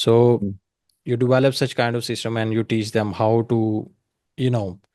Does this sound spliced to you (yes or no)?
no